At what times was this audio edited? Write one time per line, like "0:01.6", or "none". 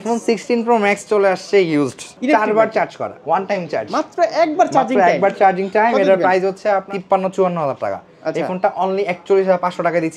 0:02.1
0:03.2
0:06.9